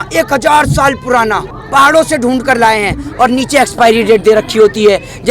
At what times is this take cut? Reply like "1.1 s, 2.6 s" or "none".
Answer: 1.5 s